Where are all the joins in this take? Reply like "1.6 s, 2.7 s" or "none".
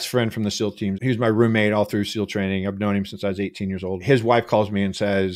1.0 s, 4.0 s

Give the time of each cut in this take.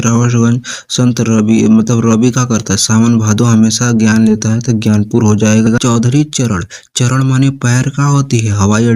5.8 s

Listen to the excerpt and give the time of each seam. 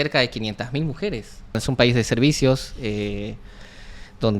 1.6 s

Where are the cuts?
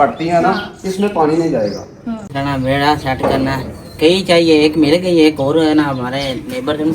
2.3 s

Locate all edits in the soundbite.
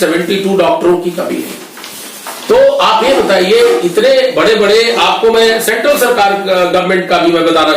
none

